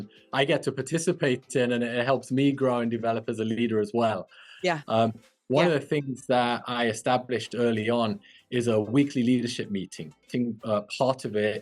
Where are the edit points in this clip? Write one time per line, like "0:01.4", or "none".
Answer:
0:05.3
0:10.3